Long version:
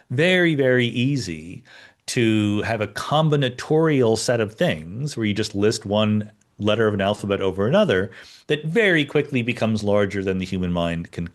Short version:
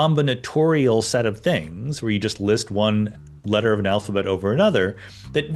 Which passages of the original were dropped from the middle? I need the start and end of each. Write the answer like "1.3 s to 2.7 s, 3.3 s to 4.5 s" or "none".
none